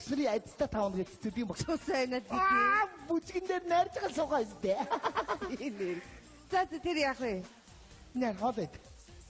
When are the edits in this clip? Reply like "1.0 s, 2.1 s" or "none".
none